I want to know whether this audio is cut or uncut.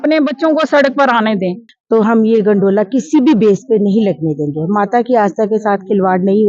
cut